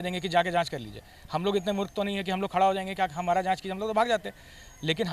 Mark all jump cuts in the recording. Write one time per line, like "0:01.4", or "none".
none